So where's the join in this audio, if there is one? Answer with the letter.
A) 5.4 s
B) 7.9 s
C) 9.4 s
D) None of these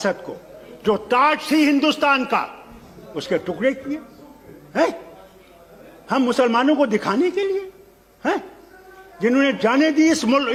D